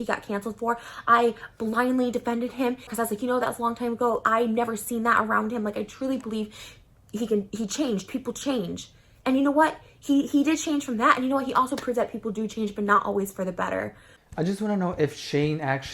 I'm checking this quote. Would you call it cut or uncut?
cut